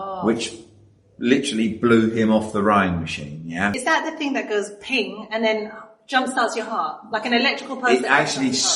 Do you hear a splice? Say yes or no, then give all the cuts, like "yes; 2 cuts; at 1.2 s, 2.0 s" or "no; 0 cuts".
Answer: no; 0 cuts